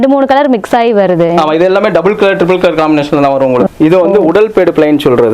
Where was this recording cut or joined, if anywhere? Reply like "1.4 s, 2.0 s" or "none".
3.7 s